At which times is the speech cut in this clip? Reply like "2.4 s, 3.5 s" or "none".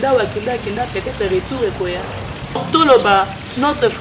2.6 s